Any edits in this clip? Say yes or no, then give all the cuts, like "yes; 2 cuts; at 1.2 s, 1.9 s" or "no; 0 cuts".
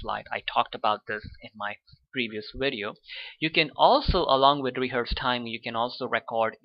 no; 0 cuts